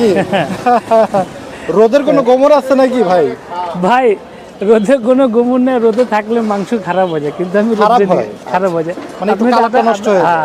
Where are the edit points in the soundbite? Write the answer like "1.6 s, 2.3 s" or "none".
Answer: none